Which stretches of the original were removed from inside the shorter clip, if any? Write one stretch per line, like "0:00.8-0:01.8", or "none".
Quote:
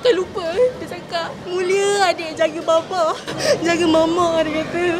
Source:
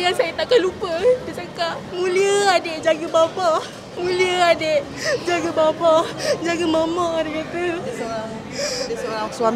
0:03.8-0:06.1